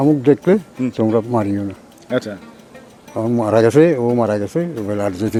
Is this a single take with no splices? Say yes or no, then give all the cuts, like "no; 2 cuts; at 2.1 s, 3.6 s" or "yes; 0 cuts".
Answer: yes; 0 cuts